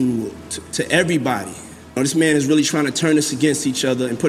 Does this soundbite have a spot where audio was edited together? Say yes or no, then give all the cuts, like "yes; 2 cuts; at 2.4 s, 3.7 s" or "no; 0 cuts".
yes; 1 cut; at 2.0 s